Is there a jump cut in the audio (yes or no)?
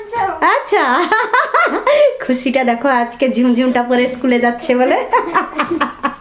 no